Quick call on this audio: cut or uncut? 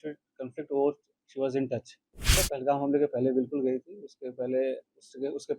cut